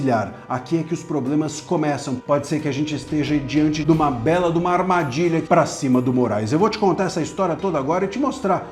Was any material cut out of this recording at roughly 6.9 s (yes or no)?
no